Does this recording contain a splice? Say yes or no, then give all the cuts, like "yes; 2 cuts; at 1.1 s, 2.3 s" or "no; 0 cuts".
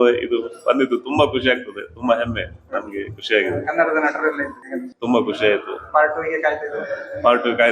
no; 0 cuts